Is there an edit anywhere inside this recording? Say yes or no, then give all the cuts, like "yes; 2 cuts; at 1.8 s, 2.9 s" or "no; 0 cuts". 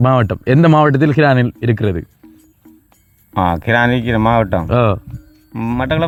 no; 0 cuts